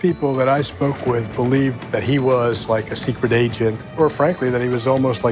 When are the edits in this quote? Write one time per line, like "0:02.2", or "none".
0:01.8
0:03.8